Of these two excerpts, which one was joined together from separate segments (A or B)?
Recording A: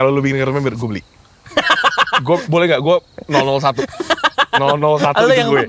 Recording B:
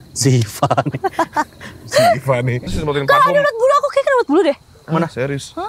B